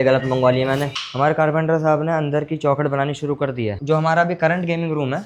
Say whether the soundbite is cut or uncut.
cut